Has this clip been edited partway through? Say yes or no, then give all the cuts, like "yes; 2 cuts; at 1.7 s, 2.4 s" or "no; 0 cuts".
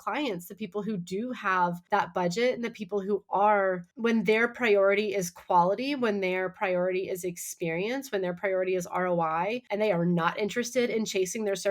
yes; 3 cuts; at 1.8 s, 3.9 s, 9.6 s